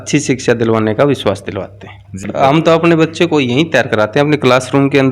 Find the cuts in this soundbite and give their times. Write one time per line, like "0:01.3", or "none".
0:02.2